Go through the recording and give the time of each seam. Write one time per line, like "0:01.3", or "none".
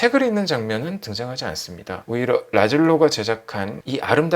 0:02.0

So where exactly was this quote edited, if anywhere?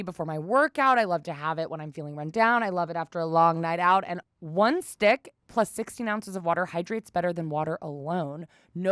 0:04.1

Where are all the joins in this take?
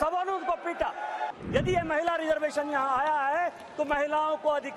0:01.3

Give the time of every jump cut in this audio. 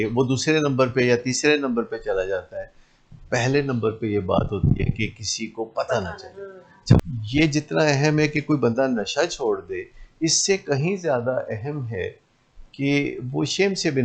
0:07.1

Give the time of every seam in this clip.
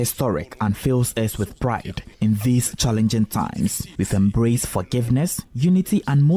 0:02.0
0:03.8
0:05.4

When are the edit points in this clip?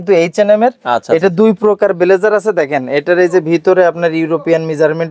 none

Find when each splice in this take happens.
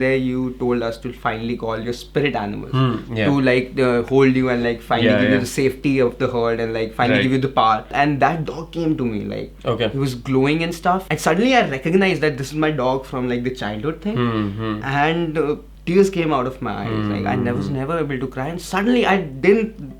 0:07.9
0:11.1
0:15.7

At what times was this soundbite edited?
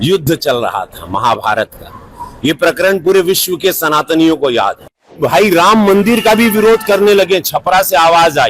0:05.2

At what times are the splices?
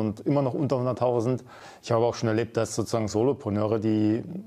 none

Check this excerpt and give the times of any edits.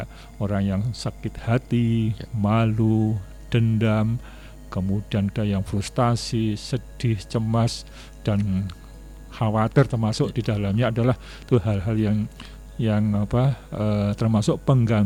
none

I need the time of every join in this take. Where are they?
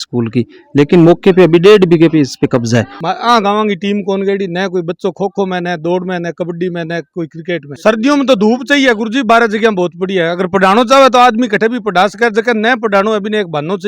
0:03.0
0:07.7

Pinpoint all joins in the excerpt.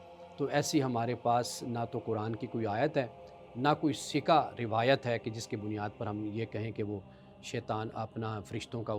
none

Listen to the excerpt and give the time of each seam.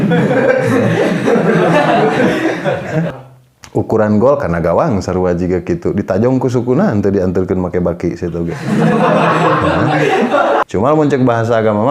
0:03.2
0:10.6

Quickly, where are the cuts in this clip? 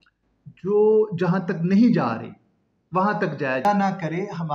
0:03.6

